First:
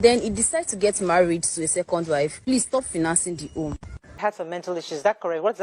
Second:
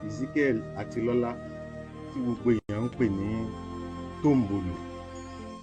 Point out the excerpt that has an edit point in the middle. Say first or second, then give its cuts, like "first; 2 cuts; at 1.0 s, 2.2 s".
first; 1 cut; at 4.2 s